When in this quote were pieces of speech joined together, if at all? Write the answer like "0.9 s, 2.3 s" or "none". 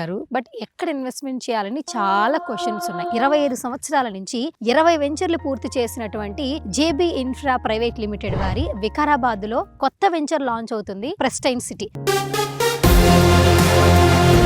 2.9 s, 11.1 s

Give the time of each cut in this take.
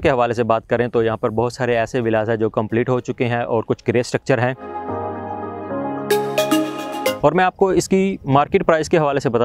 4.6 s, 6.8 s

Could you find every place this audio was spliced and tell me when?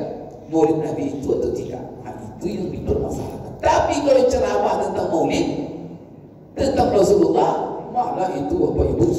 none

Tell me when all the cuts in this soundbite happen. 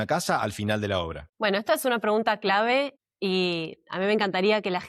3.0 s

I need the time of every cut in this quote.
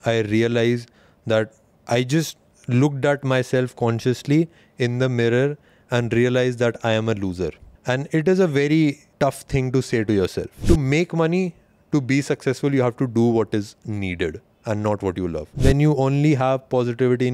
7.7 s, 9.1 s, 10.5 s, 15.5 s

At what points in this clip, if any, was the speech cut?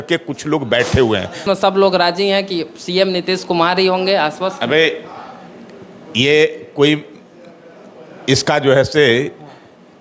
1.4 s

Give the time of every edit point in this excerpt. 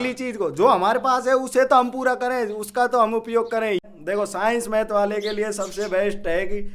3.8 s

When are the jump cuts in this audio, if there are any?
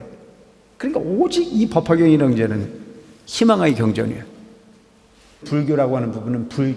5.4 s

